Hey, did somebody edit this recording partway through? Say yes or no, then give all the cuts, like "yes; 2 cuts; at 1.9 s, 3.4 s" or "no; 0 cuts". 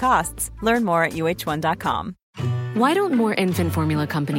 yes; 1 cut; at 2.2 s